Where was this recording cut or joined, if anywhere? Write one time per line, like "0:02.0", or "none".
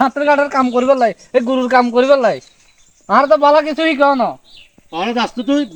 none